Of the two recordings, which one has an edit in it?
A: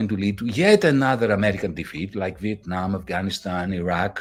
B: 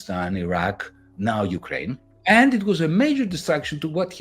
B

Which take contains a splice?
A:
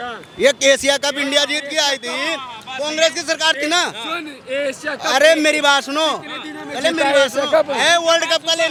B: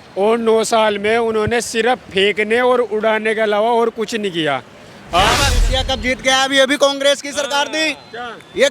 B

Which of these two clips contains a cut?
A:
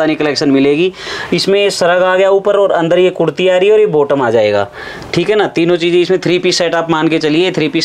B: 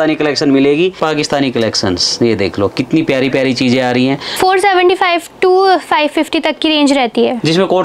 B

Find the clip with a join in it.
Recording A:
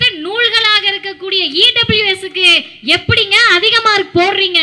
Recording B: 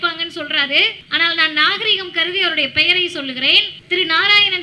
B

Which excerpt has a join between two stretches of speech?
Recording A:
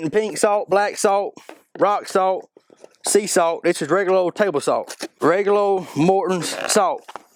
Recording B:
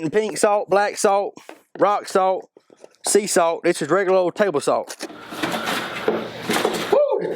B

